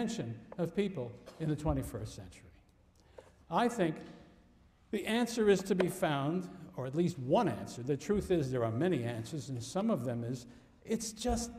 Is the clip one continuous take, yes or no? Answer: no